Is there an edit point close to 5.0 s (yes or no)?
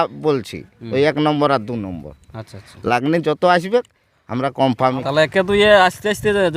yes